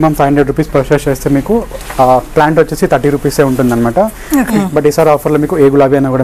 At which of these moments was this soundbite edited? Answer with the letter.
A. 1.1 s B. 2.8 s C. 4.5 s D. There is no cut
C